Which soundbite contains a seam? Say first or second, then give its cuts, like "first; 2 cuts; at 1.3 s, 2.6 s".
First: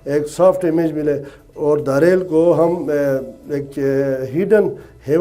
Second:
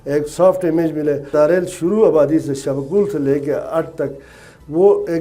second; 1 cut; at 1.3 s